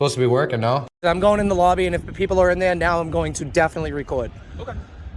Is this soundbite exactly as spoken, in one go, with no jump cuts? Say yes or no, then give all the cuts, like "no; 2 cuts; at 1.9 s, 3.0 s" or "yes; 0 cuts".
no; 1 cut; at 1.2 s